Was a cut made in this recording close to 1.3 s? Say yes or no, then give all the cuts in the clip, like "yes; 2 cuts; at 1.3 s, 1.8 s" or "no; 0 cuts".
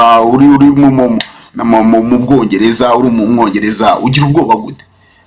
no; 0 cuts